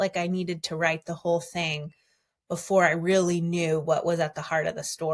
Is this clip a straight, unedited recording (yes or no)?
yes